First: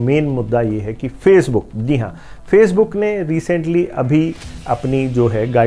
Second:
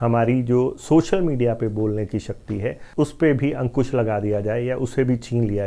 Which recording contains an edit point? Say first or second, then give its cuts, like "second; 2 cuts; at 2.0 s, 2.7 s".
second; 1 cut; at 2.8 s